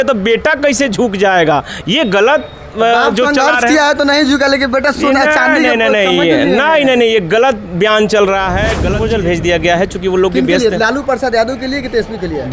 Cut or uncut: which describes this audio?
cut